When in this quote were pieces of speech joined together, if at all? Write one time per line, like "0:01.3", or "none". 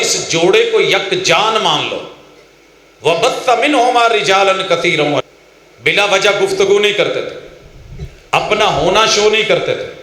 0:05.3